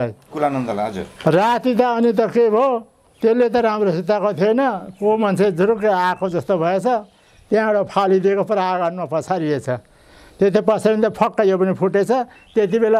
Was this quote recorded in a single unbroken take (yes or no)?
yes